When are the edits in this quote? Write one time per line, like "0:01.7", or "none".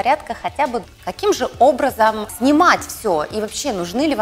0:00.9
0:02.3